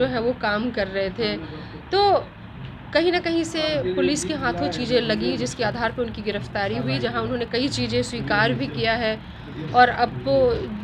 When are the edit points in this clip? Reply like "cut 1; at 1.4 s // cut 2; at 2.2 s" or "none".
none